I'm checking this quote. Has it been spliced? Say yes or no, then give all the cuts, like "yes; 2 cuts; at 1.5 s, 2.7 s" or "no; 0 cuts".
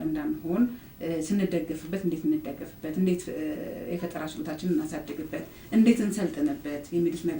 no; 0 cuts